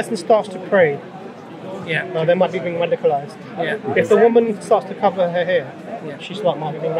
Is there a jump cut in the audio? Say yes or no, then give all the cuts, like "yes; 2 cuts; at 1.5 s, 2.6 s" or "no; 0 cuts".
no; 0 cuts